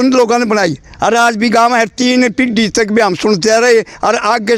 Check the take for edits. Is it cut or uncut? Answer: uncut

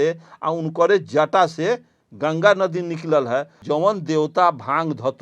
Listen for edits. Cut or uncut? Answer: cut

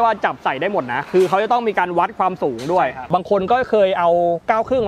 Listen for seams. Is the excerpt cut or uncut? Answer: cut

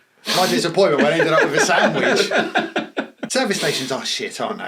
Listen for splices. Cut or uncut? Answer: cut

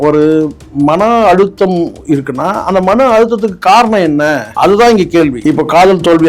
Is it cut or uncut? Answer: cut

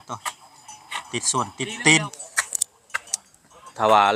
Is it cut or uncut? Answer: cut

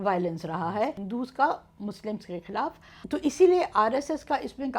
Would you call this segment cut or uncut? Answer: cut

